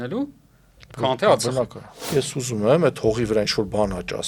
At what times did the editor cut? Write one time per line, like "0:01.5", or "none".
0:02.1